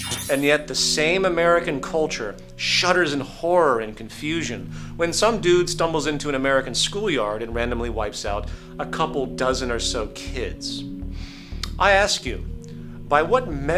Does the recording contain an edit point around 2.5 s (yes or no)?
no